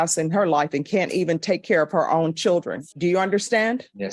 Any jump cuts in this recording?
no; 0 cuts

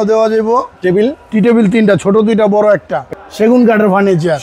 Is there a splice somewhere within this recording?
yes; 1 cut; at 3.0 s

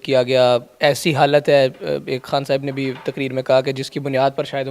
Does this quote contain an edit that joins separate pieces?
no; 0 cuts

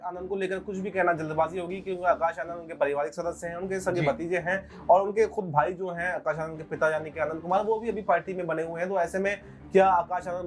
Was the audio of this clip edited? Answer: no; 0 cuts

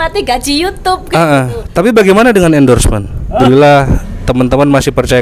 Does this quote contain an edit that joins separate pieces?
yes; 1 cut; at 3.3 s

